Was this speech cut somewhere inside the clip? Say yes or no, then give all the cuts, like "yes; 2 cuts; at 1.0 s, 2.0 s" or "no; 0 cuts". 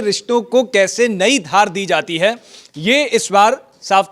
no; 0 cuts